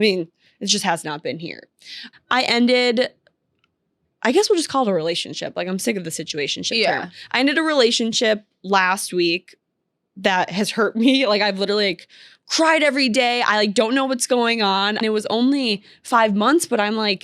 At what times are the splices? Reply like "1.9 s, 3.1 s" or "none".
2.0 s, 15.0 s